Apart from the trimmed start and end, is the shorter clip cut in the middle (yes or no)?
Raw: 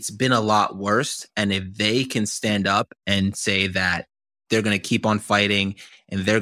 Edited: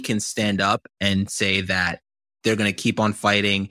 no